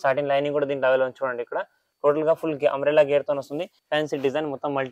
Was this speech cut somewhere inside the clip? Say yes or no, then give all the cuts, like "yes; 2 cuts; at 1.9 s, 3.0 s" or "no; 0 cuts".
yes; 1 cut; at 3.8 s